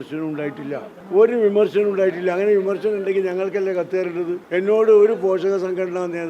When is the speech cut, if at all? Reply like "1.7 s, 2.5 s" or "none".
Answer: 0.9 s, 4.4 s